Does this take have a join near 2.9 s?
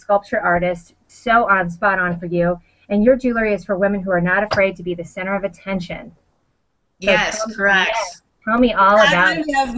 yes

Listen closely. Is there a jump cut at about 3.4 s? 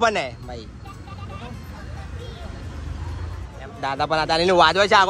yes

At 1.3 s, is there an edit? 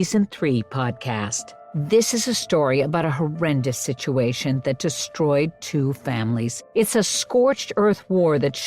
yes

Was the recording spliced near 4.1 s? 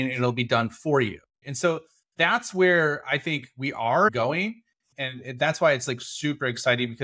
yes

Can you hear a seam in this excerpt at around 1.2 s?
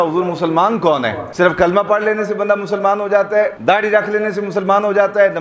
yes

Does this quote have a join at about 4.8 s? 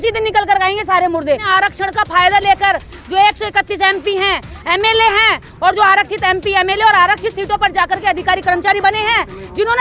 no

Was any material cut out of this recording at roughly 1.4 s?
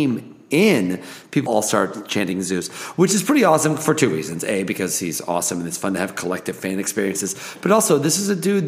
yes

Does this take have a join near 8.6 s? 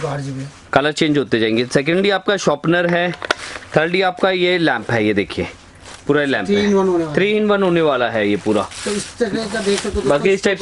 no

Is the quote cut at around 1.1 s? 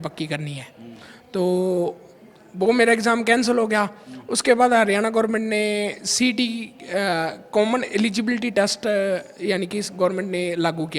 no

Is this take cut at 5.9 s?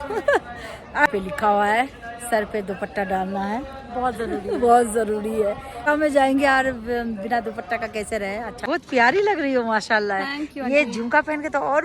yes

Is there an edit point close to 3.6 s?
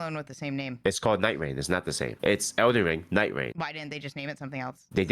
yes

